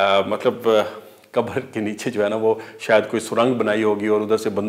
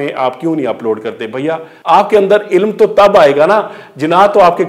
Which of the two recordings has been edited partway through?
second; 1 cut; at 1.7 s

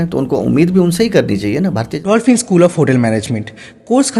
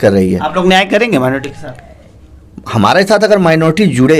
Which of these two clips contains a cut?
first; 1 cut; at 1.9 s

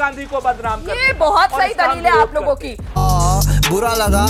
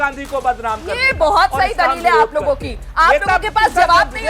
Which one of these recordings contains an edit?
second; 1 cut; at 2.9 s

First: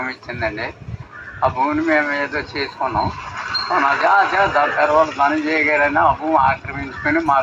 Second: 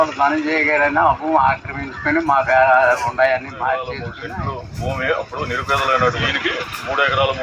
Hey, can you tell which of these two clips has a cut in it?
second; 2 cuts; at 4.1 s, 6.3 s

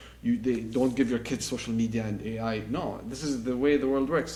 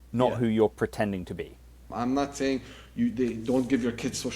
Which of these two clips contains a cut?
second; 1 cut; at 1.8 s

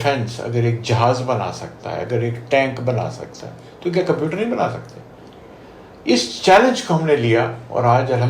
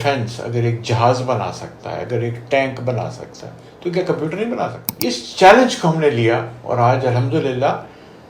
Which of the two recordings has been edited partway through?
second; 1 cut; at 5.2 s

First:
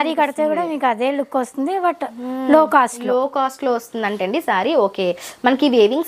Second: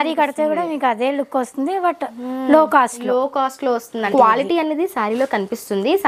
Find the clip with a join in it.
second; 1 cut; at 4.1 s

